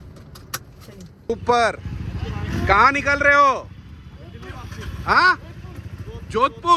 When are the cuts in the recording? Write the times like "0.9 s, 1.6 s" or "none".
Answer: 1.3 s